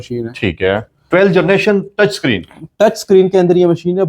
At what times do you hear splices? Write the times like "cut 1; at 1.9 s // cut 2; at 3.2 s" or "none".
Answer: none